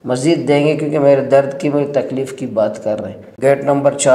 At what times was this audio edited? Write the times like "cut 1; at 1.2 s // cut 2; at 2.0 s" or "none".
cut 1; at 3.2 s